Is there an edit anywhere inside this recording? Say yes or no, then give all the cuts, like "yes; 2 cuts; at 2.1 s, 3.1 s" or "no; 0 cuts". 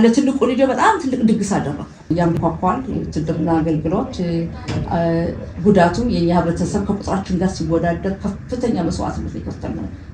yes; 1 cut; at 2.1 s